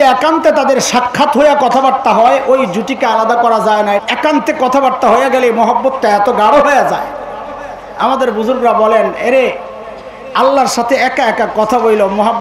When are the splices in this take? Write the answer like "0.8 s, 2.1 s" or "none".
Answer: 4.0 s